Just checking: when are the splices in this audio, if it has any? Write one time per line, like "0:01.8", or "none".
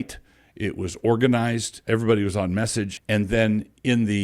0:01.7
0:03.0